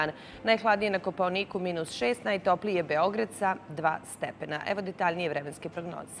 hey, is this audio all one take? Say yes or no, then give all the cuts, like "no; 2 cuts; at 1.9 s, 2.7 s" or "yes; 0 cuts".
no; 1 cut; at 2.2 s